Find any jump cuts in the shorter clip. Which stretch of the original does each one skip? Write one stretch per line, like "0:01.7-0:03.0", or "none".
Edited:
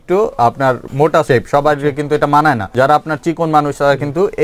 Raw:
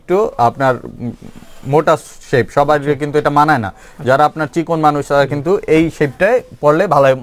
0:01.1-0:02.1
0:03.7-0:03.9